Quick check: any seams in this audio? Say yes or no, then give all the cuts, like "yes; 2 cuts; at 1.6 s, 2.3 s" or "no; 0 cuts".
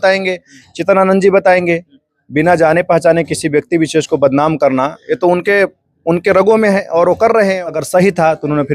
yes; 1 cut; at 7.8 s